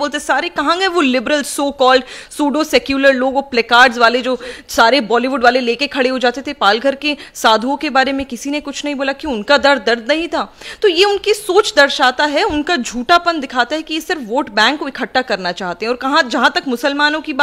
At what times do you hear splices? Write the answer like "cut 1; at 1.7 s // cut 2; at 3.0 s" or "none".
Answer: none